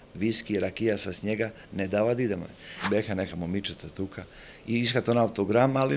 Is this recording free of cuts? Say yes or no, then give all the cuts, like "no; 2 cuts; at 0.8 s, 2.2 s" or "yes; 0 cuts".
no; 1 cut; at 2.8 s